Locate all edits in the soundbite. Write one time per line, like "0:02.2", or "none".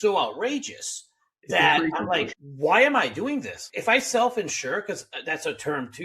0:02.3

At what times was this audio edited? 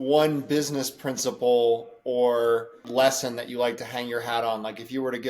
0:02.8

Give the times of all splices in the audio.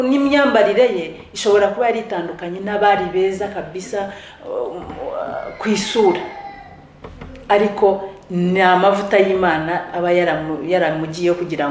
none

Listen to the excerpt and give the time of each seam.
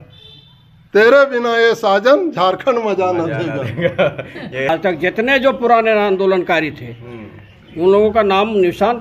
0:04.7

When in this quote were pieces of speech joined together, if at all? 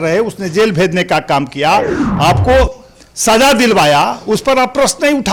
none

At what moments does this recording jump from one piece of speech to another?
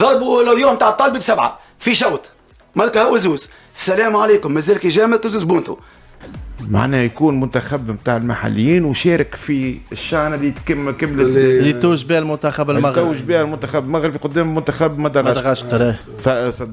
0:06.2

